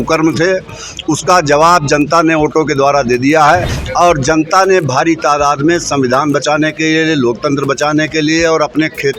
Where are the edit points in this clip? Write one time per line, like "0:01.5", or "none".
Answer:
0:03.8